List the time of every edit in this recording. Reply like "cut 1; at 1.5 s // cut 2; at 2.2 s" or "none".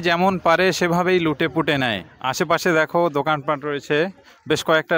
cut 1; at 2.2 s